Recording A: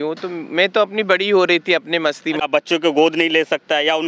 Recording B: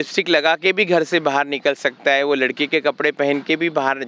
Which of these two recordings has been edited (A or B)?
A